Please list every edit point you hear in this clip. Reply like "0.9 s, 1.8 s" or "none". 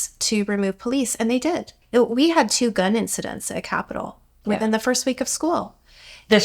1.8 s